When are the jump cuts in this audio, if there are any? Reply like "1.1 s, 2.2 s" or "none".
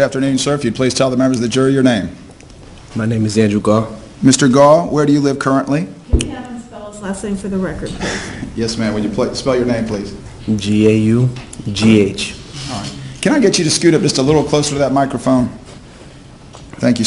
9.2 s